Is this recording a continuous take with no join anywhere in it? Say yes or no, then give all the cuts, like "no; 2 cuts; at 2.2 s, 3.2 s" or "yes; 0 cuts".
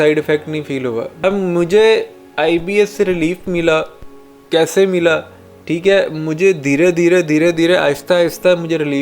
no; 1 cut; at 1.1 s